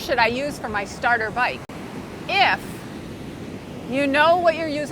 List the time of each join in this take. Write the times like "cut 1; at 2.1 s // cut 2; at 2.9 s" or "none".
cut 1; at 1.7 s // cut 2; at 3.6 s